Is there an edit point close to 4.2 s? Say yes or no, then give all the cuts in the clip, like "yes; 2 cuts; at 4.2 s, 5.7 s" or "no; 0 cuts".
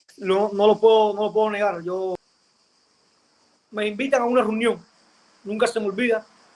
no; 1 cut; at 2.2 s